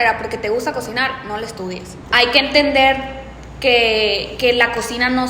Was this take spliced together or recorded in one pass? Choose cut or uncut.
cut